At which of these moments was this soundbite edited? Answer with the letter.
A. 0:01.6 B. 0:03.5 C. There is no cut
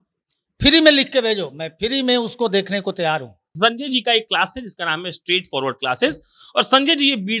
B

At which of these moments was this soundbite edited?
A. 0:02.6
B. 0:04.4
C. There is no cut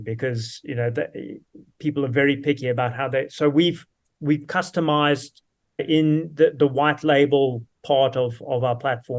C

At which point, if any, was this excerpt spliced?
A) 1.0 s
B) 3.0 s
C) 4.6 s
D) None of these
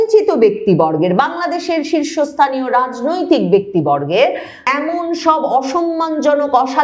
C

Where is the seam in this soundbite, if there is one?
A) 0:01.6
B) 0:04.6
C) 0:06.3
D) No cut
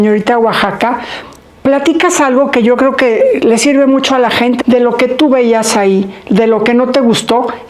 B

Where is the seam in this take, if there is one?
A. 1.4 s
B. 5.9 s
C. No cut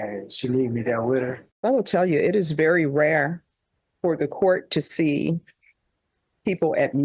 A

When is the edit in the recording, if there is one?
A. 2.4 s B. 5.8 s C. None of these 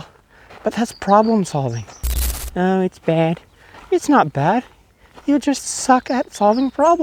A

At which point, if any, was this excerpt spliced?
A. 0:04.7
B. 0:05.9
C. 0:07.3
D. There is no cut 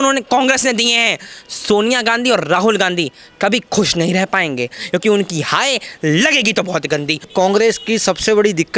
C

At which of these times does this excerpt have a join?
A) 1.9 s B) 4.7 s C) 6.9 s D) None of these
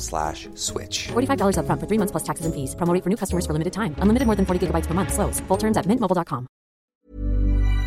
C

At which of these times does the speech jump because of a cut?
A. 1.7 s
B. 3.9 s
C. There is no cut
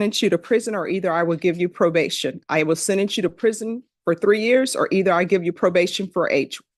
C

